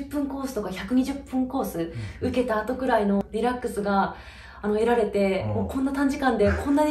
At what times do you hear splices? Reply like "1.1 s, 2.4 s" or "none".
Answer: 3.2 s